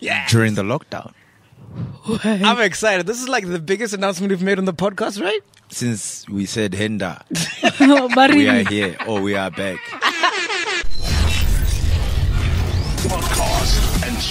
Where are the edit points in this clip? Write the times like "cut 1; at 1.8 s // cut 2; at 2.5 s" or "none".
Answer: cut 1; at 10.8 s